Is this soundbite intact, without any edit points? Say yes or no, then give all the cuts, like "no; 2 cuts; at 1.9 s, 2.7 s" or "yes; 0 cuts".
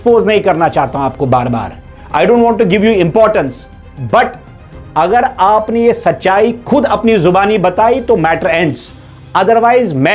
yes; 0 cuts